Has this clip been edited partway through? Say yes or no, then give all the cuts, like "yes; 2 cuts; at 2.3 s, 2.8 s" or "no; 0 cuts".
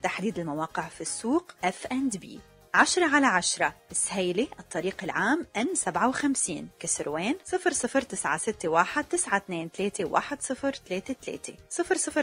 no; 0 cuts